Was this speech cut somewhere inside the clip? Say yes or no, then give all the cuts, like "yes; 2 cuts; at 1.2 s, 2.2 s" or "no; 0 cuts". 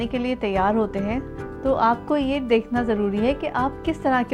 no; 0 cuts